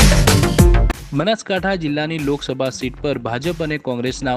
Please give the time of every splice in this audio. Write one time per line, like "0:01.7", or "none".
0:00.9